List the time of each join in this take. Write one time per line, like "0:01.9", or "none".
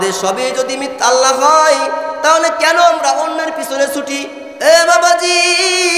0:04.4